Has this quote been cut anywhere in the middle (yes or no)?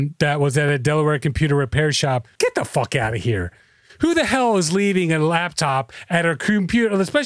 yes